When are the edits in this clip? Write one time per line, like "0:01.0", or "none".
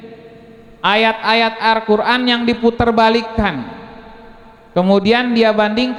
none